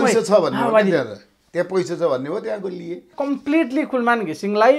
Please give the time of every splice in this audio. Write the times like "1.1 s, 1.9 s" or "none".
3.1 s